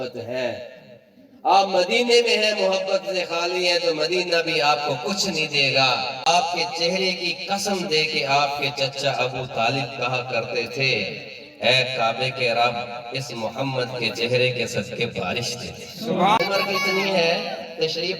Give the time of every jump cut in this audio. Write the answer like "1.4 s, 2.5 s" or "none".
6.2 s, 16.4 s